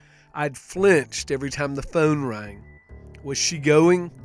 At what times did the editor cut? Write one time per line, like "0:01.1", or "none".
none